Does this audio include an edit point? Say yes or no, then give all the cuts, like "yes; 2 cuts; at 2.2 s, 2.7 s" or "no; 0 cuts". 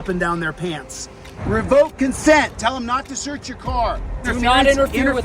yes; 2 cuts; at 1.3 s, 4.3 s